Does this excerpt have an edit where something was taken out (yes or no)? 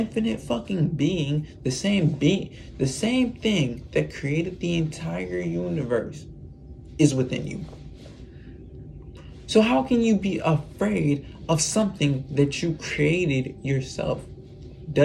no